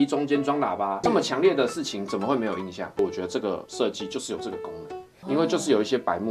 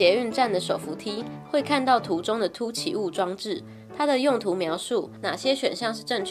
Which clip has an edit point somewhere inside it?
first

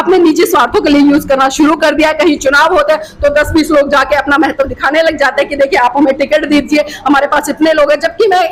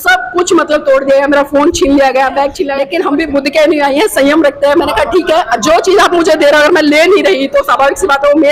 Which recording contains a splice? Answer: second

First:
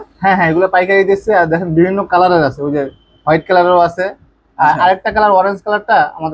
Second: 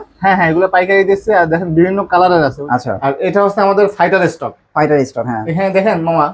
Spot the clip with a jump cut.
second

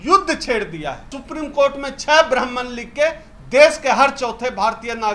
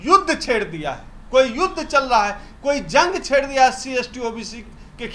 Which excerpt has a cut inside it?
first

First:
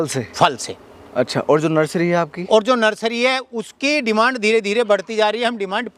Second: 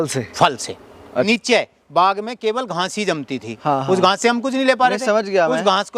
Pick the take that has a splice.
second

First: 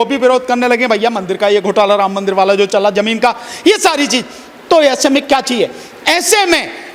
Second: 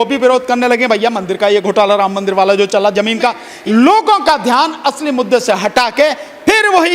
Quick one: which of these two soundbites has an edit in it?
second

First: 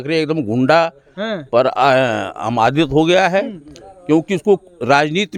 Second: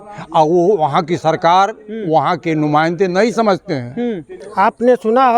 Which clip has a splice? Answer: second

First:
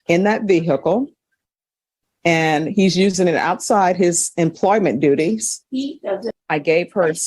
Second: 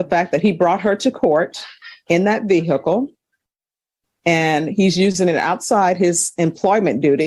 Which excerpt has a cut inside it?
first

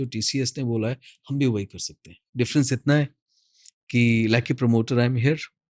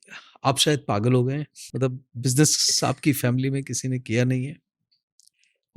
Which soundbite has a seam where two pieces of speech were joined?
second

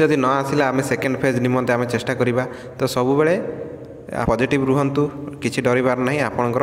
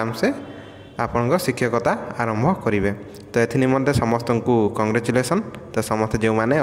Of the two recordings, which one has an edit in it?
first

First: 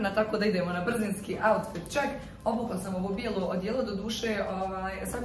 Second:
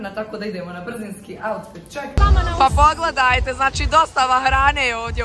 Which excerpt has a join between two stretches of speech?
second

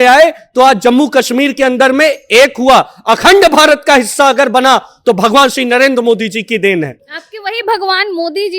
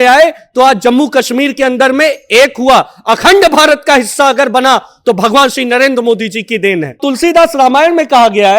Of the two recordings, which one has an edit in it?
second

